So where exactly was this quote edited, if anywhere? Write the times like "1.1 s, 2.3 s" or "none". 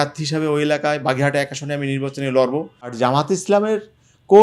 2.9 s

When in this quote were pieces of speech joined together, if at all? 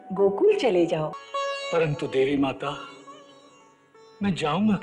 1.2 s

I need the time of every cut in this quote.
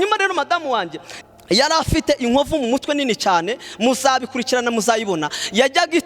1.0 s

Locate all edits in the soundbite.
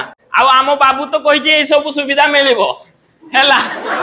none

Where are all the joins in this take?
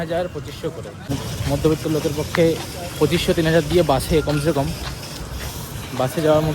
1.1 s

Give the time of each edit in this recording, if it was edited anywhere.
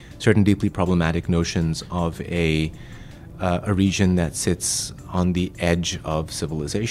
none

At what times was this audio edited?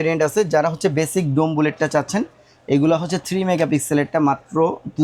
none

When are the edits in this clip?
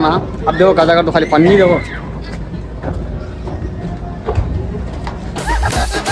none

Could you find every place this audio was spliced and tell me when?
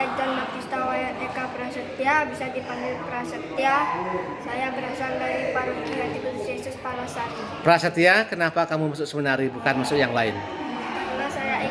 none

